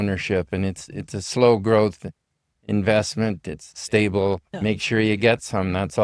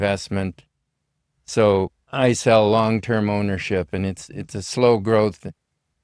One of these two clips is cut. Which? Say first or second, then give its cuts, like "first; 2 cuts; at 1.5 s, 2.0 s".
first; 1 cut; at 4.5 s